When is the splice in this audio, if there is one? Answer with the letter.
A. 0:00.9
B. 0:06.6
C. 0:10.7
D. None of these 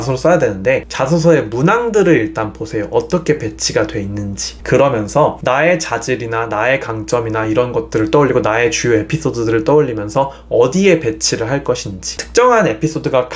A